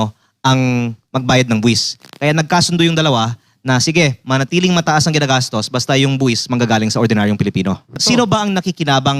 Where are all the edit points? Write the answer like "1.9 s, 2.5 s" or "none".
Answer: 8.0 s